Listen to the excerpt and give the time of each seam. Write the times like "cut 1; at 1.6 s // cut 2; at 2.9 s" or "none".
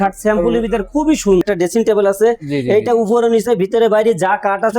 cut 1; at 1.4 s